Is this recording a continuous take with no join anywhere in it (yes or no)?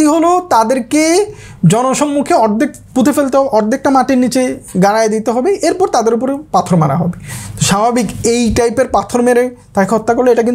yes